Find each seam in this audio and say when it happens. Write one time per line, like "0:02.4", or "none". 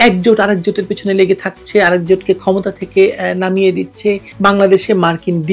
0:04.3